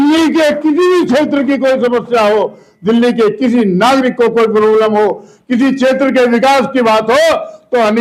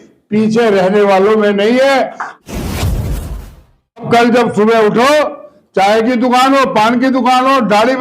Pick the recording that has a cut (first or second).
second